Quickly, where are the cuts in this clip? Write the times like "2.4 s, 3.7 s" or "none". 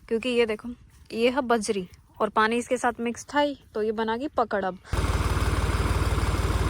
5.1 s